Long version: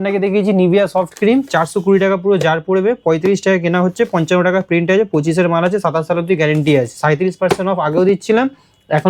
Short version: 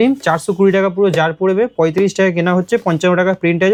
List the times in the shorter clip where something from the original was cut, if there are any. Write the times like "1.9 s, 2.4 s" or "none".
none